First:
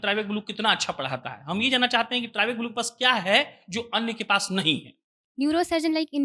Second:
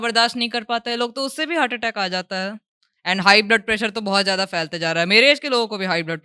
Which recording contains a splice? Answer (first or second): first